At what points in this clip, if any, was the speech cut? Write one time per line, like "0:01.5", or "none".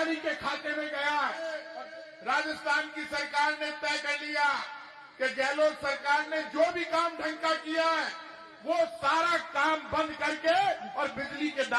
0:01.6